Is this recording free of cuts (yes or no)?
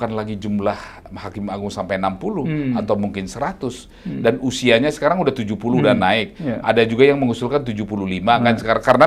yes